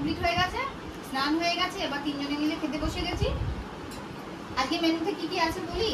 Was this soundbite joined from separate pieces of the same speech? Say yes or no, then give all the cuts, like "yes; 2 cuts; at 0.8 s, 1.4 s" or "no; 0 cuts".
no; 0 cuts